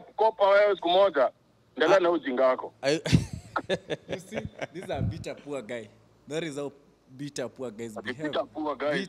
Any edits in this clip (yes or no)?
no